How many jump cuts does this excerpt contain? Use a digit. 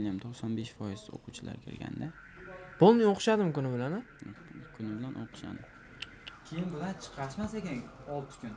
0